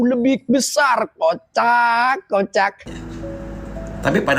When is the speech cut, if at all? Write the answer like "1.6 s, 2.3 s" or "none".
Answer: 2.8 s